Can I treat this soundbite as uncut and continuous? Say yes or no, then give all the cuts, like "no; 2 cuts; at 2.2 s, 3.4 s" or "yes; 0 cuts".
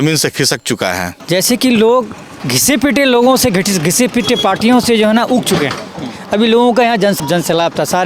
no; 3 cuts; at 1.1 s, 2.5 s, 7.2 s